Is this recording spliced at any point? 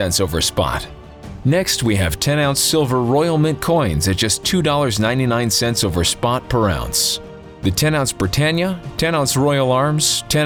no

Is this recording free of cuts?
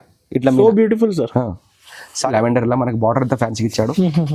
no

